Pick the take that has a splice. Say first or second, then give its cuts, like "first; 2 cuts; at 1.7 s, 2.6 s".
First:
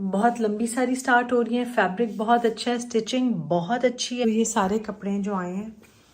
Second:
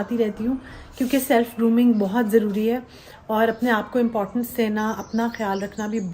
first; 1 cut; at 4.2 s